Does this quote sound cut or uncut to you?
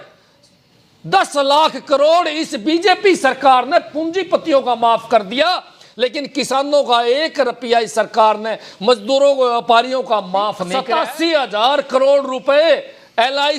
cut